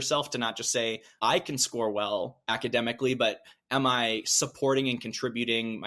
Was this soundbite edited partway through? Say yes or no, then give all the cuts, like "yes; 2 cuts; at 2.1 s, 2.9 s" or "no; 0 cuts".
yes; 2 cuts; at 1.1 s, 2.4 s